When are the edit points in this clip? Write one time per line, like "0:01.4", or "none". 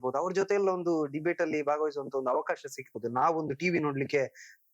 0:02.8